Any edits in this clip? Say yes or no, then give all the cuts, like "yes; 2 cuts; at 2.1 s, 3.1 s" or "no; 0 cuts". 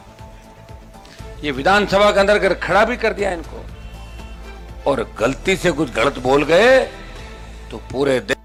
no; 0 cuts